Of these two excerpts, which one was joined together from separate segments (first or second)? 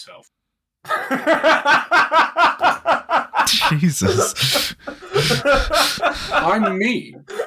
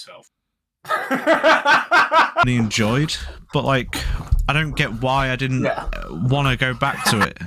second